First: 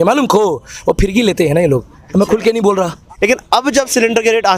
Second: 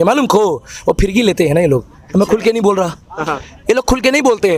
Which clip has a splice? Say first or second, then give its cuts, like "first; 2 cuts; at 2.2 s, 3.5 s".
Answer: first; 1 cut; at 3.1 s